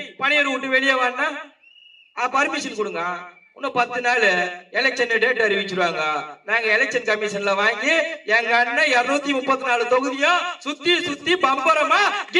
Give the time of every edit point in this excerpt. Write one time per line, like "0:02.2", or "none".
none